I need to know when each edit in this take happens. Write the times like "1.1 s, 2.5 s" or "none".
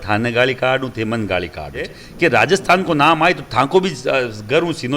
2.0 s